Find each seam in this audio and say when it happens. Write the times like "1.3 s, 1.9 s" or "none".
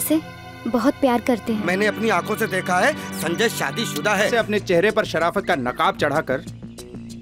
1.6 s, 4.3 s